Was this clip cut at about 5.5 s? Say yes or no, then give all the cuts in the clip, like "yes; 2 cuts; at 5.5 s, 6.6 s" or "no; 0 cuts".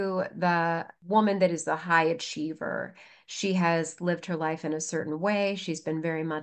no; 1 cut; at 0.9 s